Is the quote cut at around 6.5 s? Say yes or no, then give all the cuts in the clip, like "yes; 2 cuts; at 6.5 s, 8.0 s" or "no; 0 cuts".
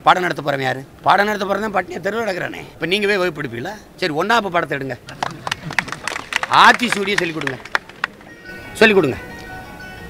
no; 4 cuts; at 0.9 s, 2.6 s, 3.8 s, 5.1 s